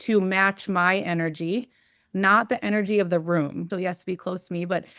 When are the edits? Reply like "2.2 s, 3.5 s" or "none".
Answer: 3.7 s